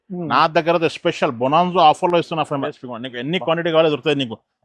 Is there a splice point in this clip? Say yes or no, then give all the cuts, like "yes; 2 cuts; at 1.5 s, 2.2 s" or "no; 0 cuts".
yes; 1 cut; at 2.7 s